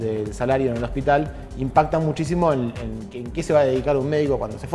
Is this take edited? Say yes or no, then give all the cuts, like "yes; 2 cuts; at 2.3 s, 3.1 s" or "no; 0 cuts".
no; 0 cuts